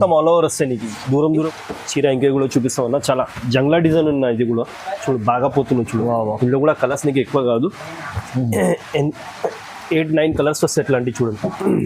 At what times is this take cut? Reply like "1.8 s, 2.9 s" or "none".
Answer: 1.5 s